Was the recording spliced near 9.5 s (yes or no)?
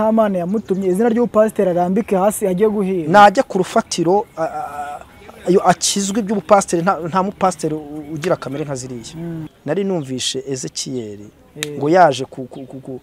yes